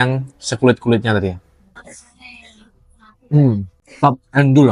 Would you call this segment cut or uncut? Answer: cut